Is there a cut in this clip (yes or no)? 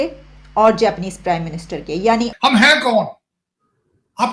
yes